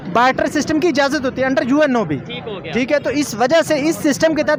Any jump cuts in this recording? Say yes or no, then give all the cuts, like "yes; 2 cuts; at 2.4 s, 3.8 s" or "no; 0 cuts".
no; 0 cuts